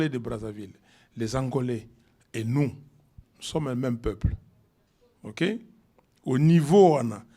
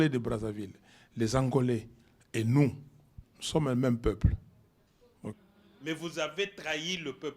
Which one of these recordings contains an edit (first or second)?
second